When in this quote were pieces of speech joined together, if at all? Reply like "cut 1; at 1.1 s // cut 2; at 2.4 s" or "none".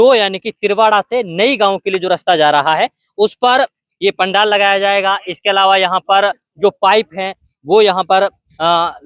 none

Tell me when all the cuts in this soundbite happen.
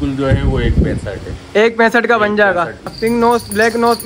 cut 1; at 2.9 s

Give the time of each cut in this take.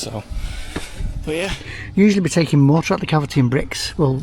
cut 1; at 1.6 s

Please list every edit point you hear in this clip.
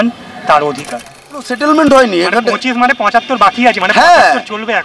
cut 1; at 1.5 s

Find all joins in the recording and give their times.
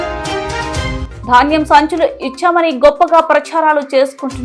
none

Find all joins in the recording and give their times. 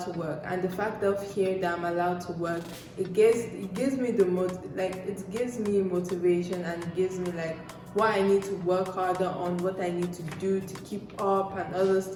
none

